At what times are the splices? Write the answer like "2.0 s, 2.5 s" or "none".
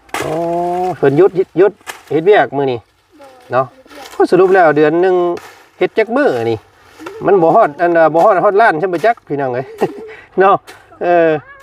none